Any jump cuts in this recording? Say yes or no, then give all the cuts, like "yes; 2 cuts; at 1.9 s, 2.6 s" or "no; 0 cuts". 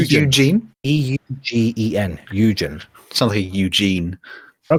no; 0 cuts